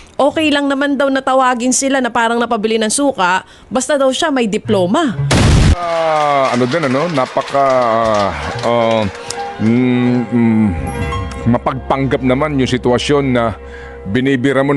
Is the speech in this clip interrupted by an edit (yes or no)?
yes